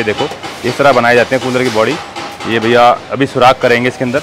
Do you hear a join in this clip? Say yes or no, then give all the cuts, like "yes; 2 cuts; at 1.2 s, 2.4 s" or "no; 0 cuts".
no; 0 cuts